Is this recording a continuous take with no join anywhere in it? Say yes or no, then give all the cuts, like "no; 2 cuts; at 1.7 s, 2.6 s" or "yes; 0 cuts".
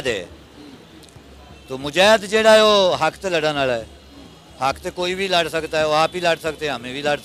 yes; 0 cuts